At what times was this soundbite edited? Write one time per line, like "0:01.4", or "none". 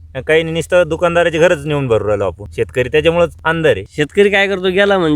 0:02.4
0:03.5